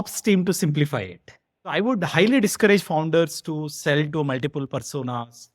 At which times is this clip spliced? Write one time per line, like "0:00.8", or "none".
0:01.7